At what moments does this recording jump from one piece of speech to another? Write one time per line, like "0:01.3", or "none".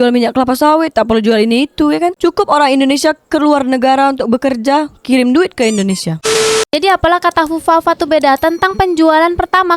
none